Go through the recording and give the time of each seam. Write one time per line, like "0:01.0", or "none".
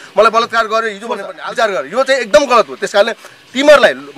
0:01.3